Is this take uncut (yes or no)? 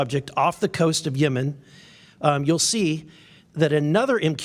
yes